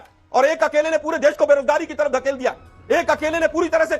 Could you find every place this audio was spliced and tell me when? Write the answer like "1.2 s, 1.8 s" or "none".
2.7 s